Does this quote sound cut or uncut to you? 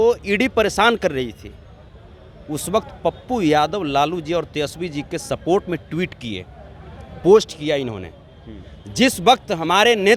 uncut